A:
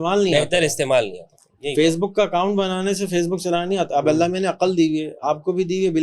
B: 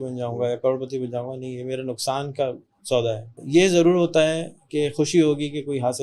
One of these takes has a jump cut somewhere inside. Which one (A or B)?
B